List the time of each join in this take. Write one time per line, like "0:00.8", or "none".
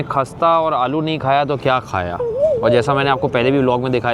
none